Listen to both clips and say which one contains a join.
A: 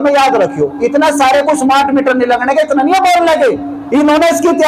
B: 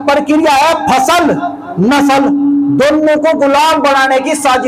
A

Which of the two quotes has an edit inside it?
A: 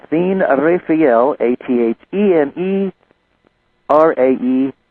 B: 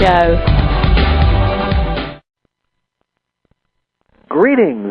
A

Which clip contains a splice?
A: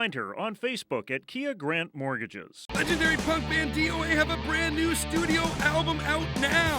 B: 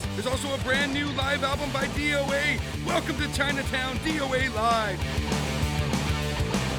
A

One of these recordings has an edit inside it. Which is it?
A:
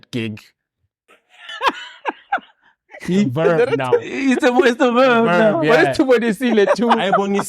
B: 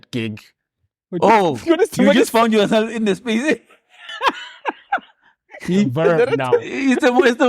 A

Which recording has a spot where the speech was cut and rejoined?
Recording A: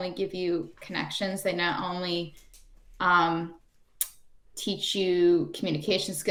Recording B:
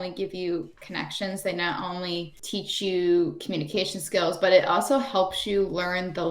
B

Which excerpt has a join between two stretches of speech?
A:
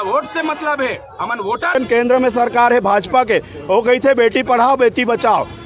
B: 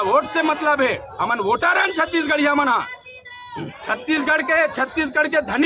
A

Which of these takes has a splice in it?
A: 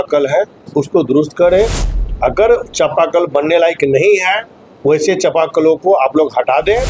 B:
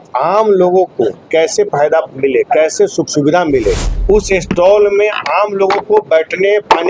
B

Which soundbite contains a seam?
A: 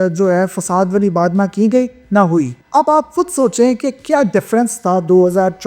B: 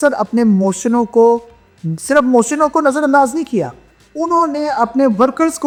A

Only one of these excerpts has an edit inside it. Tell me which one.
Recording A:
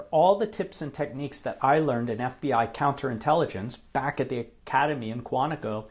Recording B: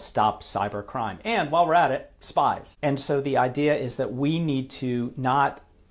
B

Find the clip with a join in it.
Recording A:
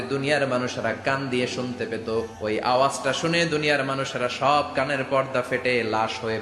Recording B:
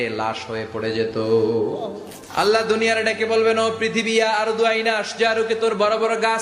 A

